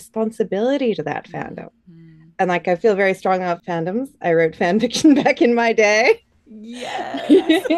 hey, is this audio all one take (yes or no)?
no